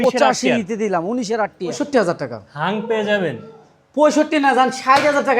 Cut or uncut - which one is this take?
cut